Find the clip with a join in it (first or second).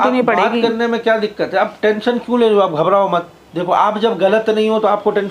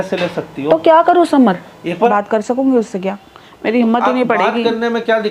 second